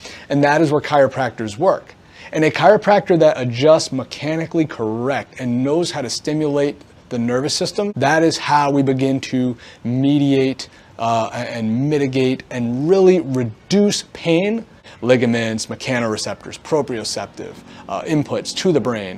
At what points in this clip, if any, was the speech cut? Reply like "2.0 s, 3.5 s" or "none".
7.9 s, 14.8 s